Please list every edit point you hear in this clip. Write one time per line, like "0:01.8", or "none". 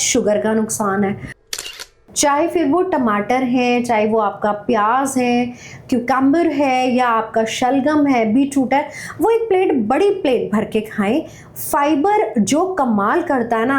0:01.6